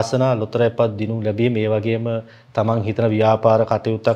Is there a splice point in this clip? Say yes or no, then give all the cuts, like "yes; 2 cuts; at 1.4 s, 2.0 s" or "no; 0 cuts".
no; 0 cuts